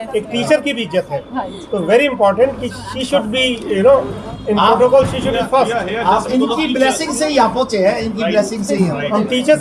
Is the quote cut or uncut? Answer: uncut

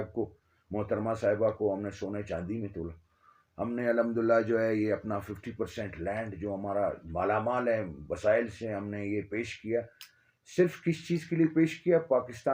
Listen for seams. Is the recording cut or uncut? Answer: uncut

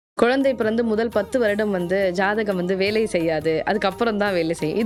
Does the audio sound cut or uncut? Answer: uncut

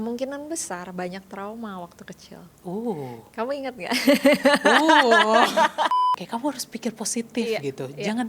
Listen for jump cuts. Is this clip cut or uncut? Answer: cut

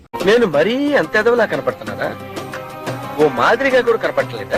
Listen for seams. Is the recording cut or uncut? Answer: uncut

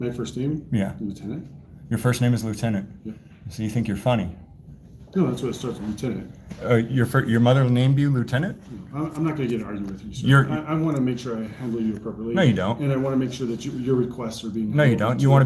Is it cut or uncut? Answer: uncut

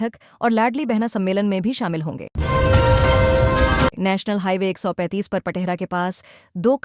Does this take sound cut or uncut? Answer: uncut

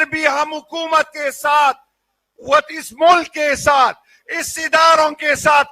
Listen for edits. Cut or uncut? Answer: uncut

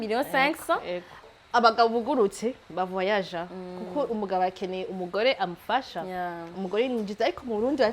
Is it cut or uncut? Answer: cut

